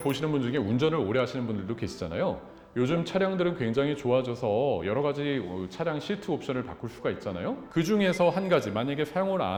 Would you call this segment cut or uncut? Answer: uncut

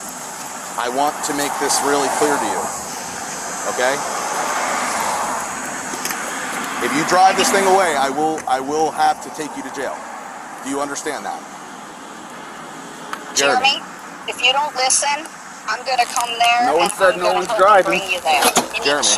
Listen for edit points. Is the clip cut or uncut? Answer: uncut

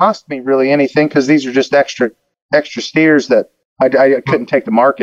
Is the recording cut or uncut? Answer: cut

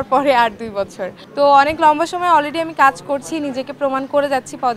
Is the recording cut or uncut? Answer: uncut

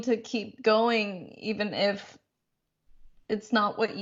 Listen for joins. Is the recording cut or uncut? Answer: uncut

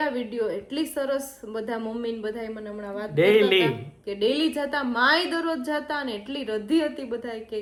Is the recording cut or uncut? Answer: uncut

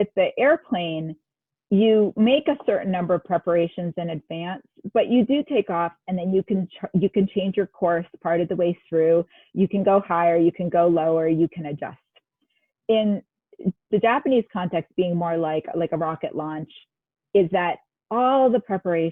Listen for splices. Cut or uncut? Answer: uncut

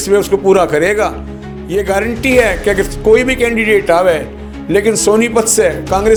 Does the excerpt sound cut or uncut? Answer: uncut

